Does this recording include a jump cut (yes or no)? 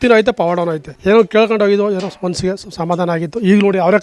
yes